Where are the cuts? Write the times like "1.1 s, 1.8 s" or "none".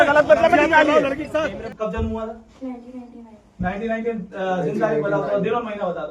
1.7 s